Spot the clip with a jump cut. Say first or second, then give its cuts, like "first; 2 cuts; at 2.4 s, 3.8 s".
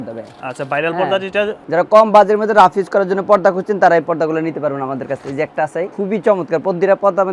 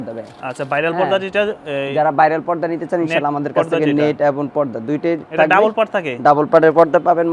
first; 2 cuts; at 1.6 s, 5.9 s